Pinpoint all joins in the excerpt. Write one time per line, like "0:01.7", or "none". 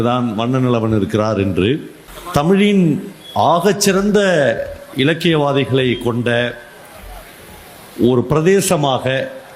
0:02.5